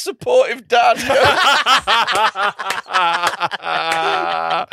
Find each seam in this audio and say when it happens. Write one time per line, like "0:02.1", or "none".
none